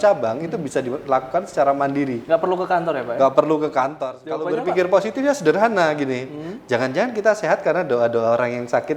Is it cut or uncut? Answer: cut